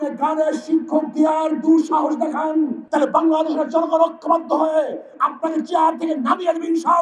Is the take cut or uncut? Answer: cut